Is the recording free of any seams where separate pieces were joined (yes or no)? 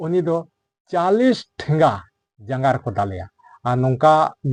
yes